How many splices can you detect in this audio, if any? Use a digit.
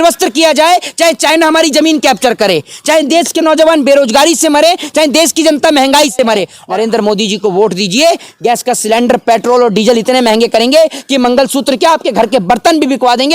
1